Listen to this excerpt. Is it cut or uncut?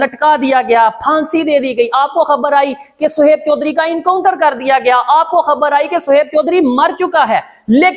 uncut